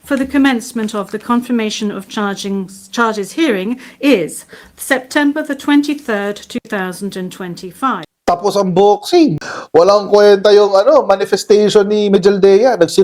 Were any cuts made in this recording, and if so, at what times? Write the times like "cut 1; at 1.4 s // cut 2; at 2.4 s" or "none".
cut 1; at 8.0 s // cut 2; at 9.5 s

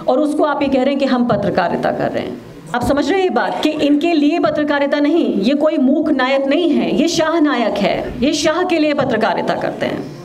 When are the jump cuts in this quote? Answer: cut 1; at 2.7 s

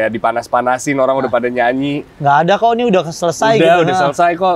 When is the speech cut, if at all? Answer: none

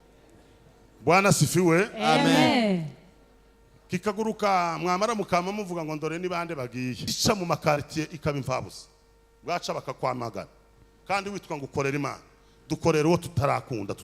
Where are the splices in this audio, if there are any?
cut 1; at 7.1 s

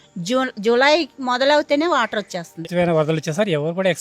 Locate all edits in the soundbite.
cut 1; at 2.7 s

